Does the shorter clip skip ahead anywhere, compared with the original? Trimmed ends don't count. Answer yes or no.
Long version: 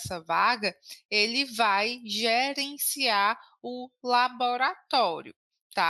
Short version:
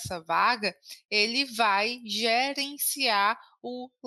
no